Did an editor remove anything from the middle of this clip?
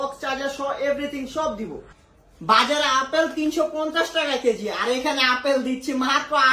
yes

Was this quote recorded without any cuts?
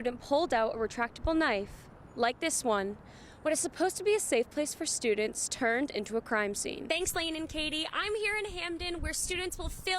no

